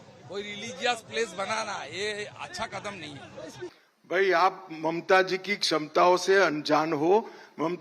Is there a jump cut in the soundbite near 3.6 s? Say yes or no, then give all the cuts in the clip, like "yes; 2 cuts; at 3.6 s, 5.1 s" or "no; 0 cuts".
yes; 1 cut; at 3.6 s